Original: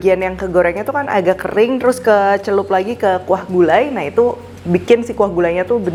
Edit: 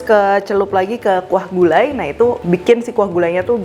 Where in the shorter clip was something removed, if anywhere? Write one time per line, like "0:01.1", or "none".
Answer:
0:02.4

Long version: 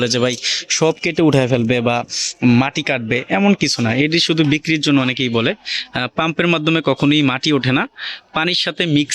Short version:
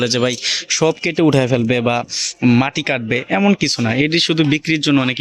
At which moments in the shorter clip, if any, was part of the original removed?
none

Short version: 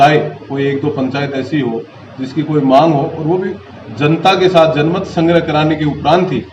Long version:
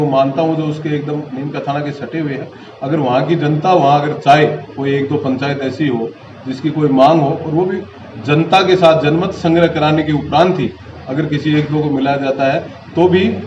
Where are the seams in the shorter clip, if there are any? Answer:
none

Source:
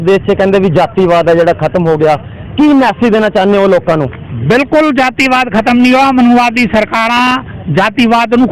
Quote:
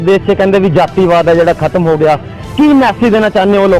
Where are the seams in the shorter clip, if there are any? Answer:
none

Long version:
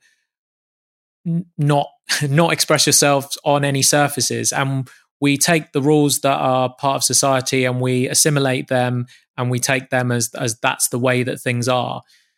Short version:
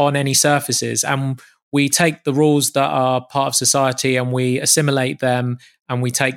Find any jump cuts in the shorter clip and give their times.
none

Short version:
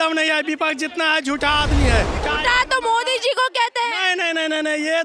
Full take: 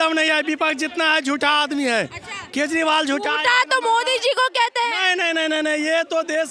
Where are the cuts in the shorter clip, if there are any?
0:02.2

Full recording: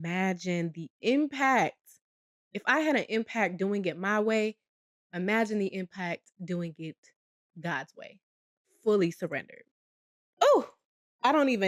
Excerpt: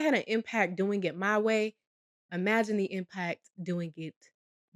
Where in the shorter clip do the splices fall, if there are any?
none

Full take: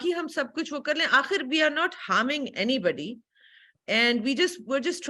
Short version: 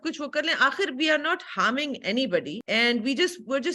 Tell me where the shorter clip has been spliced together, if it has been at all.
0:02.6

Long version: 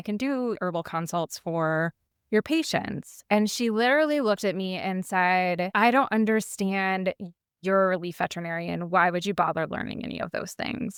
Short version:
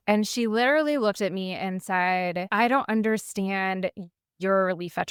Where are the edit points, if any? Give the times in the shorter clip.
none

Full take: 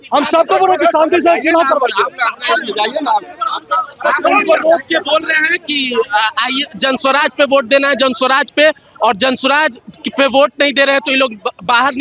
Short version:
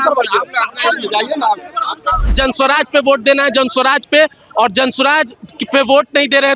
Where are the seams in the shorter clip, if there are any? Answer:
0:02.2

